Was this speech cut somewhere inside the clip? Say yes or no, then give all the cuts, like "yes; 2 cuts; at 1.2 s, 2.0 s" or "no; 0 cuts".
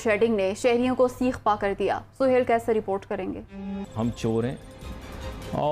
yes; 1 cut; at 3.8 s